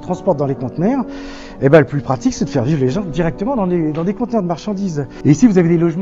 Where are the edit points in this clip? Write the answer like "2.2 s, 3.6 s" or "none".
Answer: 5.1 s